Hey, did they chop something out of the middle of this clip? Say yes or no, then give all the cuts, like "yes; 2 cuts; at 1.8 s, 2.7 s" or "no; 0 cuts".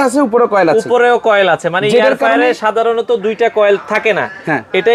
no; 0 cuts